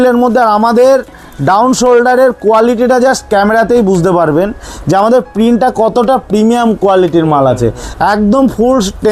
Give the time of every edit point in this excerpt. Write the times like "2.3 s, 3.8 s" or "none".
none

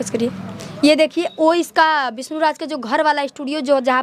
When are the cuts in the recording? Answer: none

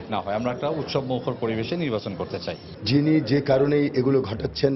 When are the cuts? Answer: 2.6 s

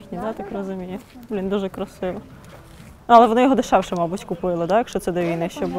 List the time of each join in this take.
none

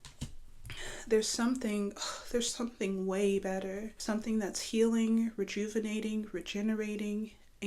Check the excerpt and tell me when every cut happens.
4.0 s

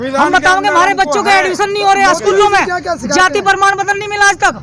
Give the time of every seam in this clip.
1.7 s

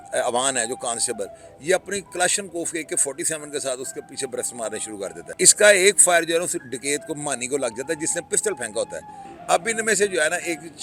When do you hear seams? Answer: 5.2 s, 9.3 s

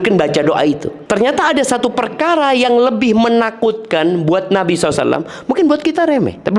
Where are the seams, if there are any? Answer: 0.9 s

